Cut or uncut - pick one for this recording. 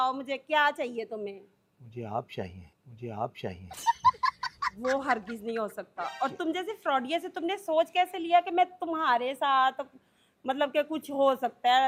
uncut